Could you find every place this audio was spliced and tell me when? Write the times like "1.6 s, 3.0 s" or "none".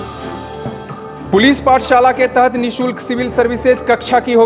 none